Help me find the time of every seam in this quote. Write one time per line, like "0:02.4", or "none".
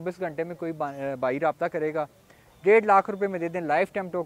none